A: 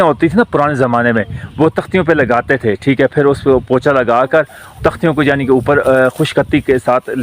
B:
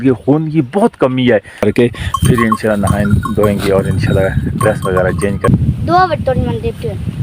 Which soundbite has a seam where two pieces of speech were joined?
B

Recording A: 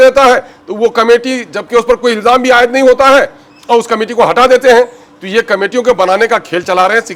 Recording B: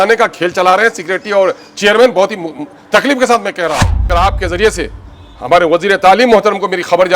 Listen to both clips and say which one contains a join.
B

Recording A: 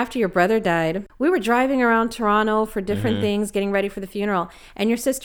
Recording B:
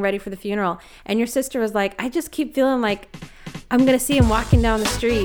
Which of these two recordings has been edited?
A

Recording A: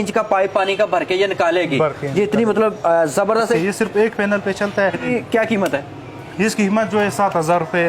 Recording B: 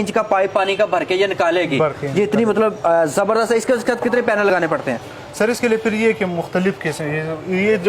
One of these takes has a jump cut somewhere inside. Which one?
A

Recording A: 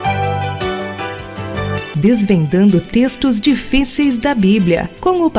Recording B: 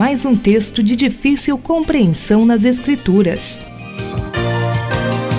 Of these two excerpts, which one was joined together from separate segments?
B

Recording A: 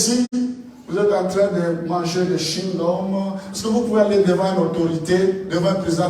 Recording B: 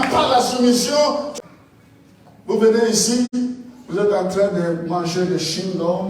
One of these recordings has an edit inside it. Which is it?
B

